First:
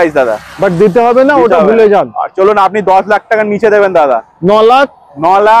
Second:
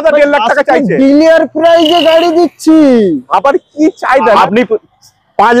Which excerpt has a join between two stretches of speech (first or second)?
second